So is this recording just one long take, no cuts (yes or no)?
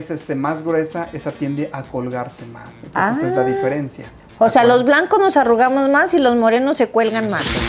yes